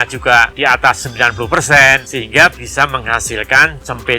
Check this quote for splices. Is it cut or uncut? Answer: cut